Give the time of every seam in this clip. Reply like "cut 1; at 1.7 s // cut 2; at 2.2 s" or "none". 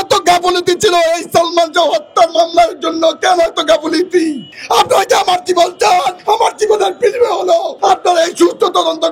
cut 1; at 4.5 s // cut 2; at 6.2 s // cut 3; at 7.7 s